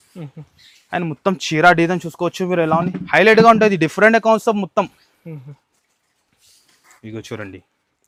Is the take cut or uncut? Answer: uncut